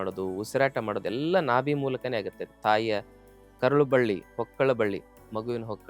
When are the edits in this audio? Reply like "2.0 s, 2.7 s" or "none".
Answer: none